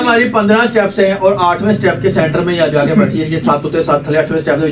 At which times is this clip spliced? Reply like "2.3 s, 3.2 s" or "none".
none